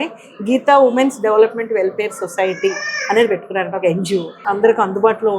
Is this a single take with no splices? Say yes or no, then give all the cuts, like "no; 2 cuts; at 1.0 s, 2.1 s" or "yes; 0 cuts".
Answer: no; 1 cut; at 4.3 s